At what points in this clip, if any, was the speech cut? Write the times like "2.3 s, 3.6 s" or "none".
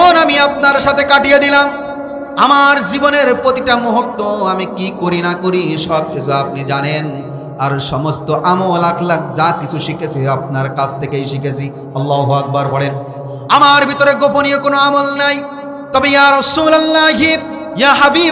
none